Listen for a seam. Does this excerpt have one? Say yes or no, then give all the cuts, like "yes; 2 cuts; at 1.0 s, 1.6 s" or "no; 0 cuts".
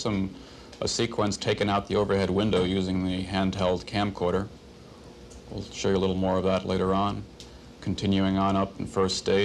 no; 0 cuts